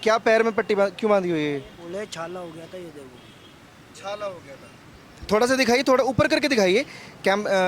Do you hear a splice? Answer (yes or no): no